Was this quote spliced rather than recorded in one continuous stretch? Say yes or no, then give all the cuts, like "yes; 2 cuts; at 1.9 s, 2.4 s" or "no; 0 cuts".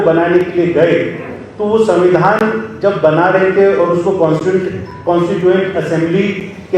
no; 0 cuts